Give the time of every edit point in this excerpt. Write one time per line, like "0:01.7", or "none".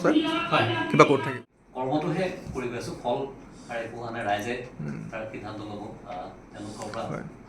0:01.3